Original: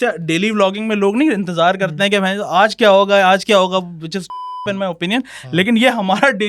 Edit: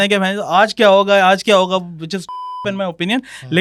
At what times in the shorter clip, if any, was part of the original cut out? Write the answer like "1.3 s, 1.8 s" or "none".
none